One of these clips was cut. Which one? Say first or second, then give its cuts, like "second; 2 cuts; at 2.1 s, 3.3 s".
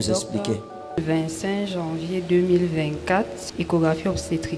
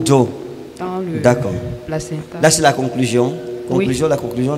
first; 2 cuts; at 0.9 s, 3.4 s